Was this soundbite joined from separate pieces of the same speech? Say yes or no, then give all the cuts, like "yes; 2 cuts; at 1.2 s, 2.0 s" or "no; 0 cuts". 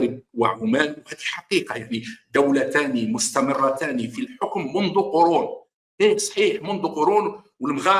no; 0 cuts